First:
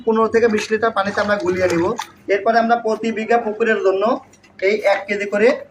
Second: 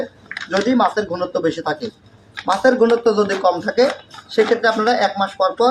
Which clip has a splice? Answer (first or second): first